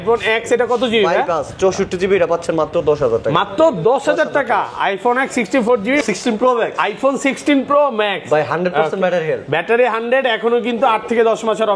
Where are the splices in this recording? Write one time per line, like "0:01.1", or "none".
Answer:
0:06.0